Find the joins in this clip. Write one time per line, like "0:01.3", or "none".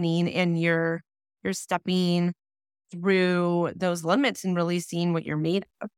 none